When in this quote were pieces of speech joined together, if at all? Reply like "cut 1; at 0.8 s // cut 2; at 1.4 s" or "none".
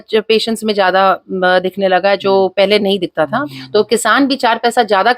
cut 1; at 3.4 s